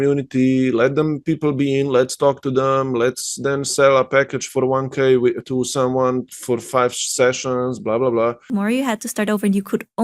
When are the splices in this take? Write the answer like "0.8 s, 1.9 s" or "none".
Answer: 8.5 s